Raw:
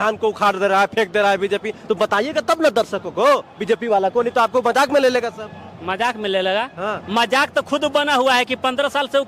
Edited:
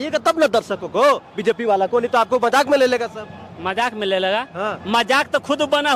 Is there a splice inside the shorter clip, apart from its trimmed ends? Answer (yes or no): no